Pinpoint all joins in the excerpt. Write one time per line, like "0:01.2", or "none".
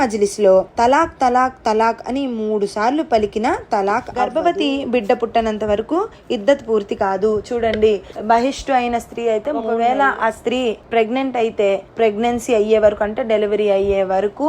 0:04.3
0:09.7

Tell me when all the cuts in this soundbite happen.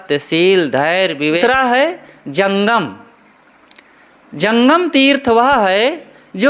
0:01.4

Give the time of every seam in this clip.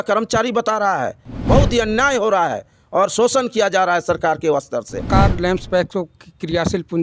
0:01.3
0:05.1

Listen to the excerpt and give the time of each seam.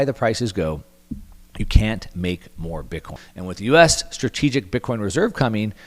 0:03.2

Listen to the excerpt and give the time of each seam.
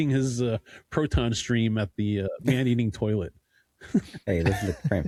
none

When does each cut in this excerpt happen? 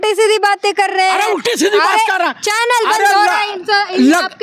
none

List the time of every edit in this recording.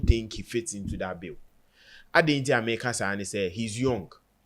none

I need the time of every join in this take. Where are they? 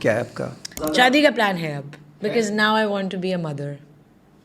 0:01.0

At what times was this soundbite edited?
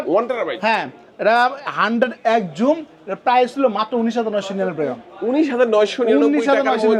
none

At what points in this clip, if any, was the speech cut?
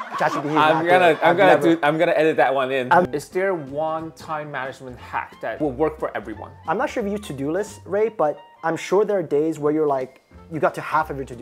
0:03.1
0:06.5

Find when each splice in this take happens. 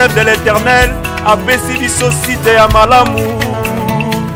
none

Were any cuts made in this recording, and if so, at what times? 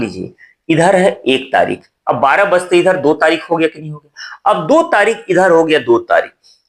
none

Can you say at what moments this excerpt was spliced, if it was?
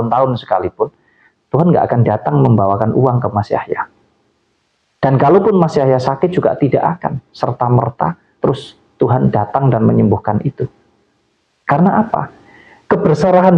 none

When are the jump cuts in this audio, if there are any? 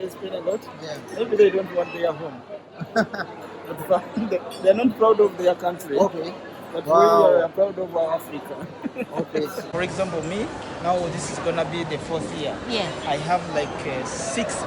0:09.7

